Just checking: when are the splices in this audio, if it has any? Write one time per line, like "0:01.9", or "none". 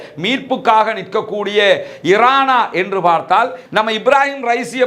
0:03.6

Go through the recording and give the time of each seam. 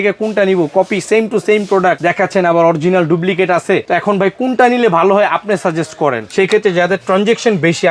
0:02.0
0:03.8
0:06.2

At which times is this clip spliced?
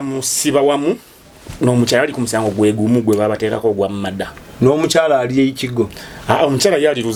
none

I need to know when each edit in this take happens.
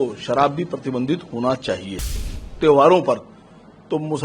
0:02.2

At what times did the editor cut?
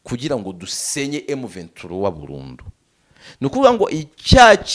none

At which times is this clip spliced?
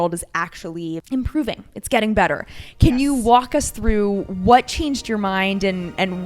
0:01.0

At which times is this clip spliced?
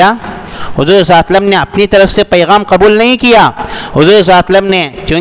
none

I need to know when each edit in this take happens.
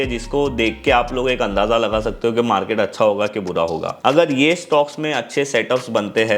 0:03.9

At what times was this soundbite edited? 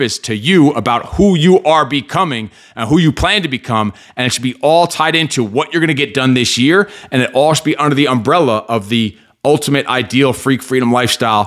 none

